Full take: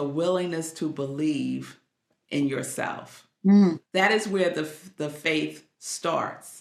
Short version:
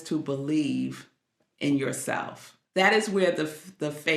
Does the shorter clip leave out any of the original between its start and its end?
yes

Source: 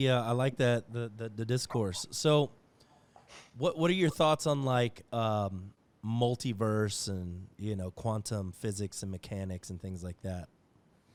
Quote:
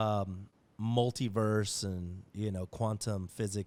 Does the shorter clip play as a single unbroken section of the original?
yes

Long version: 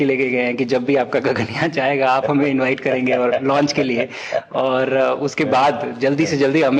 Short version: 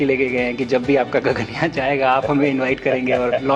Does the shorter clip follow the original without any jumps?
yes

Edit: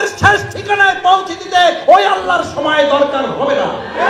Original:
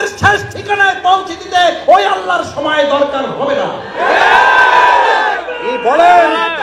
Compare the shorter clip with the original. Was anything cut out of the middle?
no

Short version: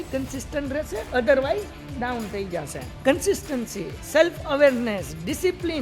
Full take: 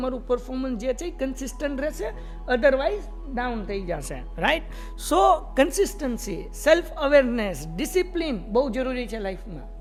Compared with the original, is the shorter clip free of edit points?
no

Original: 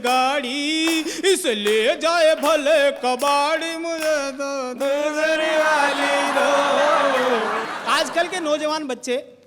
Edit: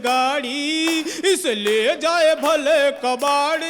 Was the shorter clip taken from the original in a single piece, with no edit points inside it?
yes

